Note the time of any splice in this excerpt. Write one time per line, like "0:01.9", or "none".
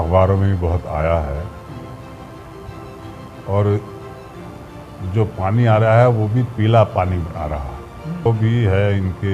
0:08.3

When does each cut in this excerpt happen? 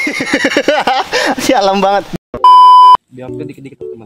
0:03.1

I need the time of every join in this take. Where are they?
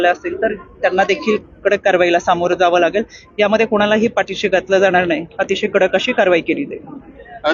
none

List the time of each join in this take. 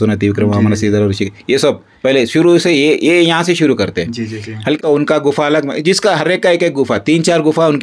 0:04.8

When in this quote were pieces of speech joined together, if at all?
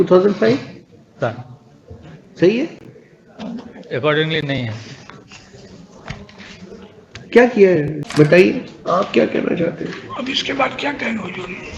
0:08.0

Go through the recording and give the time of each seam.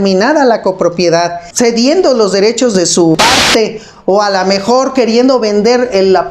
0:01.4
0:03.1

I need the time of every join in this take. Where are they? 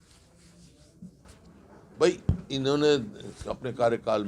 0:01.3

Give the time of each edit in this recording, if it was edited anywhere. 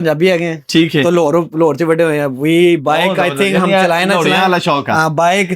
none

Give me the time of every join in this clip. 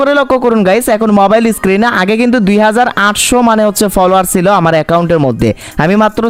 none

